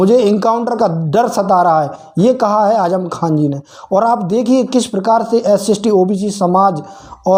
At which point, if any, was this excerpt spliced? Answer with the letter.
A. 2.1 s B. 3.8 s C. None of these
C